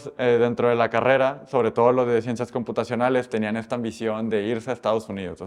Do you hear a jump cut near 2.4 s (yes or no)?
no